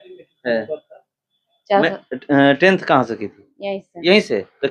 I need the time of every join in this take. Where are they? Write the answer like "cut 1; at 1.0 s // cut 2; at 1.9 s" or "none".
none